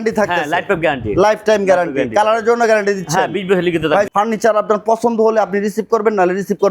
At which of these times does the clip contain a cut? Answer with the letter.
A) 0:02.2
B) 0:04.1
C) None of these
B